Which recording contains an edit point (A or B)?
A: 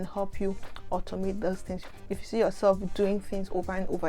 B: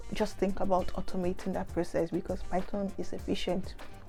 A